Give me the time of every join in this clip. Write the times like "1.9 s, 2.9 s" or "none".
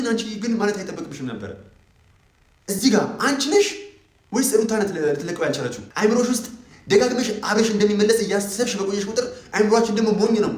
5.8 s